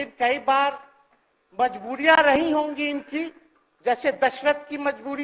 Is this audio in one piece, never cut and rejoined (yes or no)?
yes